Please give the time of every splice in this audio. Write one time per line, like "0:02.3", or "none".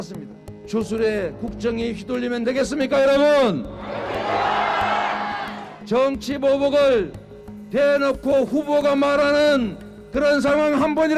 none